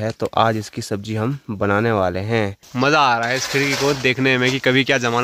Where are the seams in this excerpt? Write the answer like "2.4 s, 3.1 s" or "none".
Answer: 2.7 s